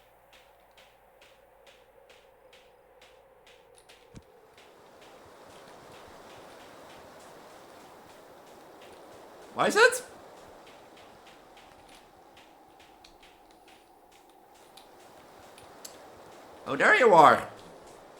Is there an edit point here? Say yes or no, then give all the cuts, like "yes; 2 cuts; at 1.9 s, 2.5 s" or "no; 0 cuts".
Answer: no; 0 cuts